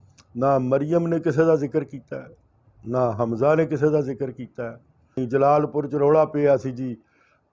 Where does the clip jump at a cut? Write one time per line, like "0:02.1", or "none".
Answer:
0:05.2